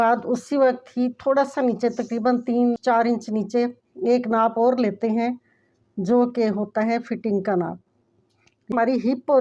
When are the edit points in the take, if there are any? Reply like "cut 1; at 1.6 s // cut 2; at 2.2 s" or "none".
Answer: cut 1; at 2.8 s // cut 2; at 8.6 s